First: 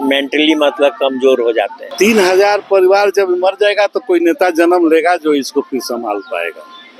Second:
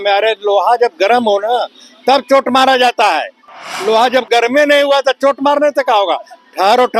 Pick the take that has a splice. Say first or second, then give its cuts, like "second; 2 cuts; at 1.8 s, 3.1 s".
first; 1 cut; at 1.8 s